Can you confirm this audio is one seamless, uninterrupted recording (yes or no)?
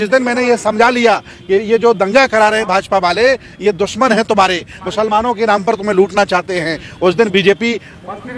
yes